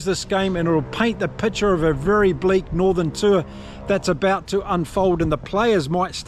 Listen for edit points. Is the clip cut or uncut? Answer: uncut